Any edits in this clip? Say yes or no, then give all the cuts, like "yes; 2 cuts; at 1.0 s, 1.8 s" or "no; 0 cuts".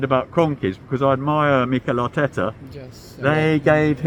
no; 0 cuts